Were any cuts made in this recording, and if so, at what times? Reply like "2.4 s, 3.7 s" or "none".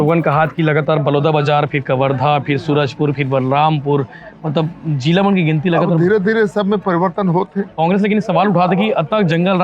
7.7 s